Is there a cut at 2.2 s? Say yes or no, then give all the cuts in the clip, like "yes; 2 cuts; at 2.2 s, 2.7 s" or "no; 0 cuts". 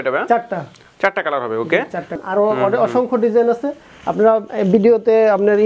yes; 1 cut; at 2.2 s